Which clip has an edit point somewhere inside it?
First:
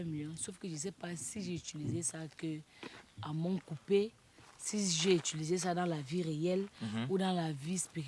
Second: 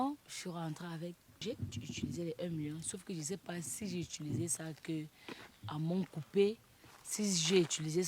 second; 1 cut; at 1.4 s

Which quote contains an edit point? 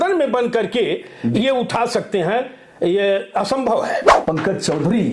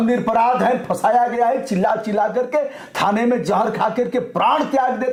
first; 1 cut; at 4.1 s

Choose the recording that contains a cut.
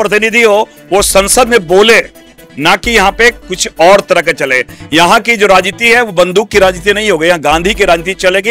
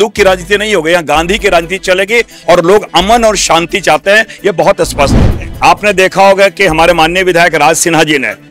second; 1 cut; at 5.2 s

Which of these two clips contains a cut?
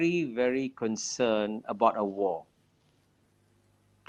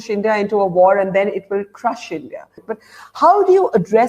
second; 1 cut; at 2.7 s

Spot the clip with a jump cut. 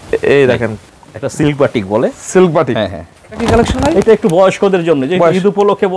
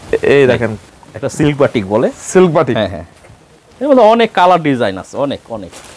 first; 1 cut; at 3.4 s

